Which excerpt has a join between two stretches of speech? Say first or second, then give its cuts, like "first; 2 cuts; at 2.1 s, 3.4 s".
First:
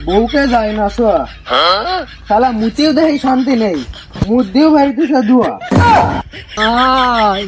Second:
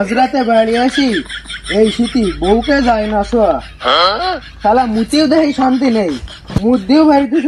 first; 1 cut; at 6.4 s